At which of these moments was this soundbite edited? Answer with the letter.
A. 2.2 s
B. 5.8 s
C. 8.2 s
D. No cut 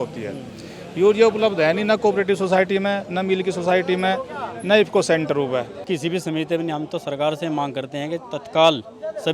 B